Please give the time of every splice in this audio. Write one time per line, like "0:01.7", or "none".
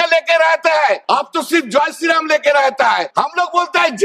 0:01.0
0:03.1